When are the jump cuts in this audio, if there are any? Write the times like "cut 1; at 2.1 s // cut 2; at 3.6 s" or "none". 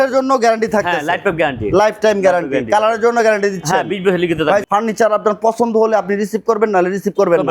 cut 1; at 4.6 s